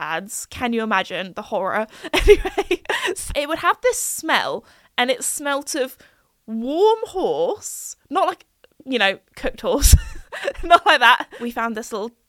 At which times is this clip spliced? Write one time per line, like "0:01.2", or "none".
0:03.2
0:11.3

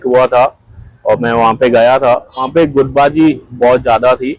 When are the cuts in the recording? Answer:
0:02.5

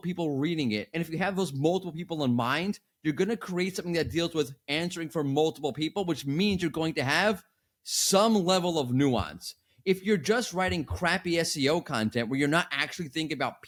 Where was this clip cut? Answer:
none

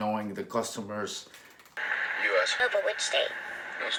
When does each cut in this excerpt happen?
none

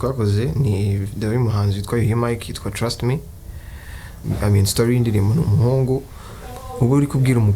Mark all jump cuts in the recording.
0:04.2

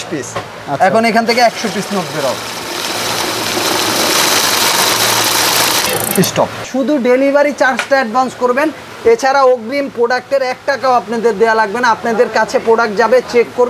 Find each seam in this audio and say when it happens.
0:06.7

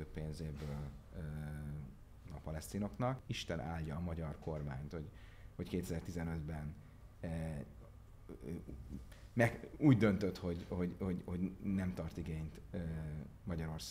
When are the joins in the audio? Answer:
0:03.3

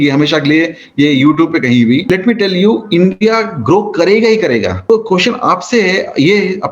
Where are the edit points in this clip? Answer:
0:02.0
0:04.8

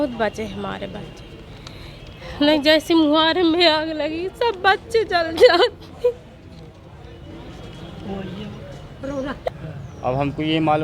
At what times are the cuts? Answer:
0:09.5

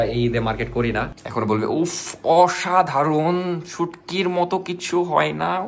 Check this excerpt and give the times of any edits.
0:01.2

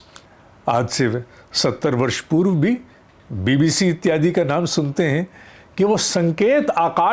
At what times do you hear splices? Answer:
none

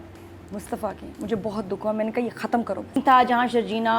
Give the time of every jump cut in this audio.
0:03.0

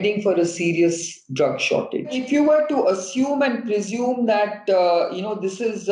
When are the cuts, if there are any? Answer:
0:02.2

